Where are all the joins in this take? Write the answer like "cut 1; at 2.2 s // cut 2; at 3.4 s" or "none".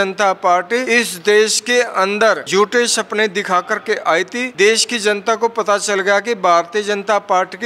cut 1; at 0.8 s // cut 2; at 2.4 s // cut 3; at 4.4 s

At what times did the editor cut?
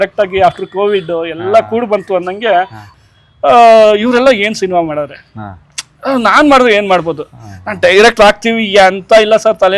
cut 1; at 2.8 s

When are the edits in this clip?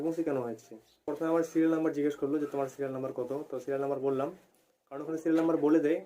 cut 1; at 1.0 s

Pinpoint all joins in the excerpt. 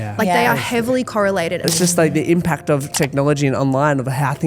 cut 1; at 1.7 s // cut 2; at 2.9 s

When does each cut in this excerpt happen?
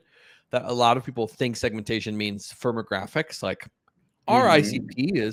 none

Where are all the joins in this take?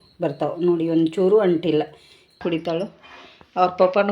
cut 1; at 2.4 s

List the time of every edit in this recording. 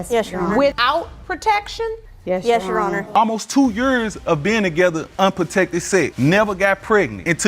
cut 1; at 3.1 s

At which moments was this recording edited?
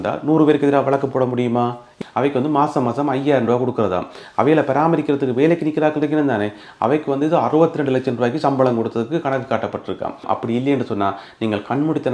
cut 1; at 1.9 s // cut 2; at 10.2 s

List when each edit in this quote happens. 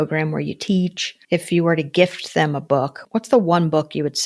cut 1; at 1.1 s // cut 2; at 3.0 s

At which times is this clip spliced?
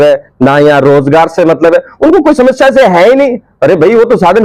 none

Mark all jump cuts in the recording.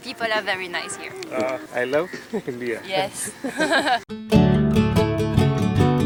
none

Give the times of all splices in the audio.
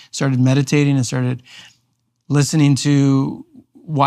none

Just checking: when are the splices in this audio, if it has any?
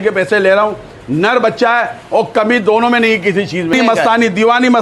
cut 1; at 3.7 s

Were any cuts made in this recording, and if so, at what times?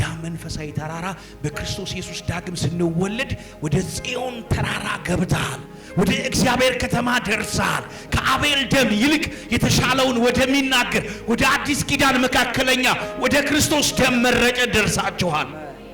none

